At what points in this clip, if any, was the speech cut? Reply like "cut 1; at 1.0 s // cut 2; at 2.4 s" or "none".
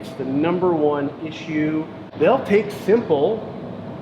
cut 1; at 2.0 s